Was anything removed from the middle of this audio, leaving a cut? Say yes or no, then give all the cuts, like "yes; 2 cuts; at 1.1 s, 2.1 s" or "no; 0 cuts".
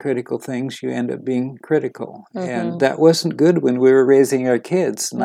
no; 0 cuts